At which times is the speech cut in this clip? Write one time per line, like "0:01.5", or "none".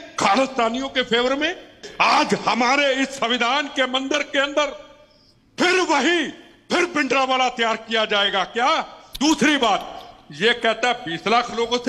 0:01.8
0:09.0